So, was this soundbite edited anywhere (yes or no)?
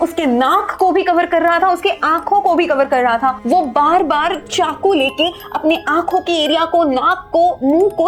no